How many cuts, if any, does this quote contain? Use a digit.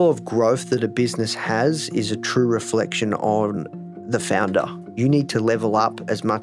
1